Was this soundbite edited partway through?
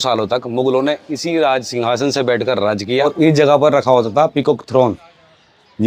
yes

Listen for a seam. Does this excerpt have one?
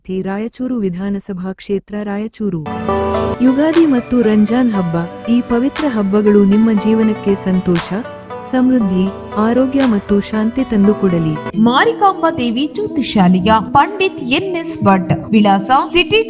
yes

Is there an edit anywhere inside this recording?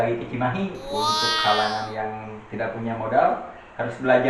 yes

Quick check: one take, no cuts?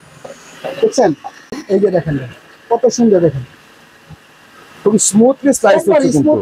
no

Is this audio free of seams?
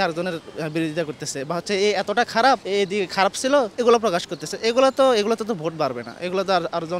no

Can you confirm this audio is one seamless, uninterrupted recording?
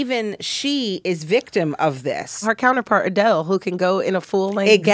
no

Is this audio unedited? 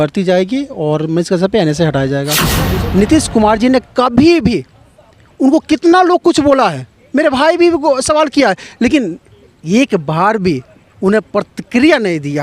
no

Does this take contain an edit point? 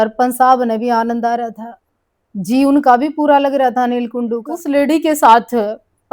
yes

